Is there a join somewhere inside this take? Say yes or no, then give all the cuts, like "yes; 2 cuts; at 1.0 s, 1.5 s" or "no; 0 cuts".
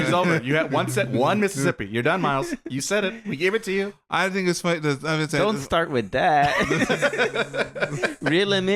no; 0 cuts